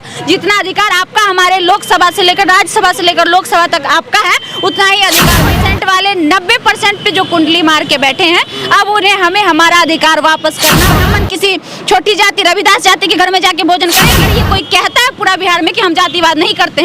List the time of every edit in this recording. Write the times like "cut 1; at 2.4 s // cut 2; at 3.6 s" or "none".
cut 1; at 5.4 s // cut 2; at 10.9 s // cut 3; at 14.3 s